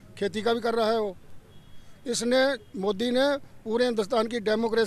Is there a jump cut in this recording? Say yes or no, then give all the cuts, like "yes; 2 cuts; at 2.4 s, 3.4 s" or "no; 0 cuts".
no; 0 cuts